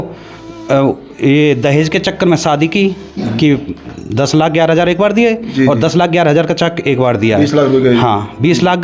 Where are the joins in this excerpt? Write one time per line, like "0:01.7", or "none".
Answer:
none